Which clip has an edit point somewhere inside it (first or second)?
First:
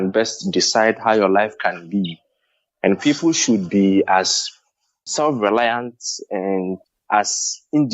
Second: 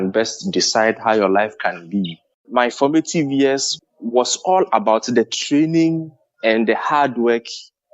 second